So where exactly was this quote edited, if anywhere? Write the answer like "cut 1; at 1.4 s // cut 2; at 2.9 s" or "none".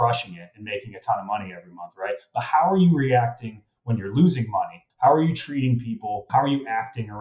cut 1; at 4.8 s // cut 2; at 6.2 s